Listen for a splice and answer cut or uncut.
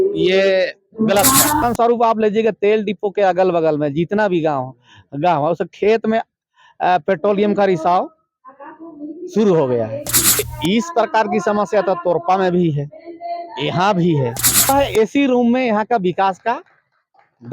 cut